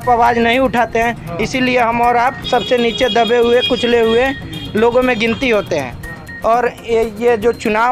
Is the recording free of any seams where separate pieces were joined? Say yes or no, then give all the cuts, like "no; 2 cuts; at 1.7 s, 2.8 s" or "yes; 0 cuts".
yes; 0 cuts